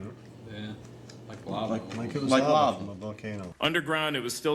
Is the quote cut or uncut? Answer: cut